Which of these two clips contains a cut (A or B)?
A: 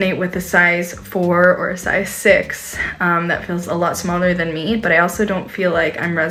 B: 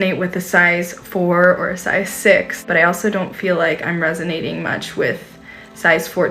B